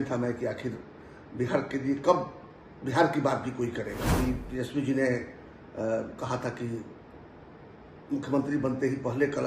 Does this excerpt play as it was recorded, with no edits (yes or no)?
no